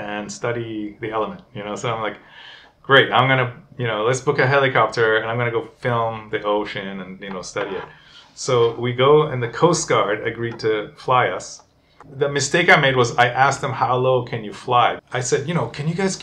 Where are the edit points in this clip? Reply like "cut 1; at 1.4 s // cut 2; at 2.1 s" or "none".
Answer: cut 1; at 12.0 s // cut 2; at 15.0 s